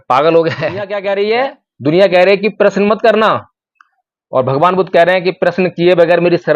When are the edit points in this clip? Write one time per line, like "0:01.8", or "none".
0:00.9